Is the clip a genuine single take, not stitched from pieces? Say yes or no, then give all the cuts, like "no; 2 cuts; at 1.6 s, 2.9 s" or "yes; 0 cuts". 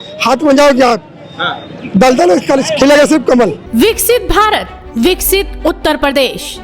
yes; 0 cuts